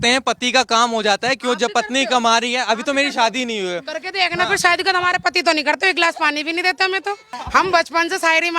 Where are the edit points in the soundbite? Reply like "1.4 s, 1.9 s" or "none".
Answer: 7.4 s